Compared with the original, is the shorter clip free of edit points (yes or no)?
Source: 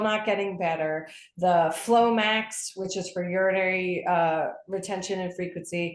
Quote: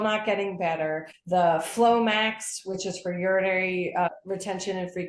no